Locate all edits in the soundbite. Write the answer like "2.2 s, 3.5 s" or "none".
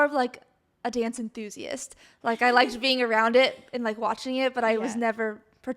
none